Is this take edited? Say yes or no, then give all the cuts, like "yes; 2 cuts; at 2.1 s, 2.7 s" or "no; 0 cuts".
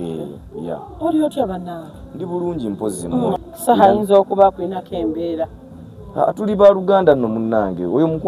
yes; 1 cut; at 3.4 s